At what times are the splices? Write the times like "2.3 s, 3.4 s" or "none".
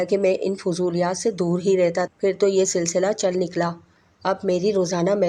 2.1 s